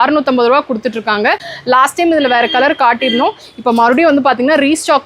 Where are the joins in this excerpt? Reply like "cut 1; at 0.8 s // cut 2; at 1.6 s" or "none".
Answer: cut 1; at 1.5 s